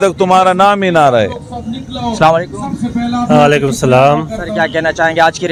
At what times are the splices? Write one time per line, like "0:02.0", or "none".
none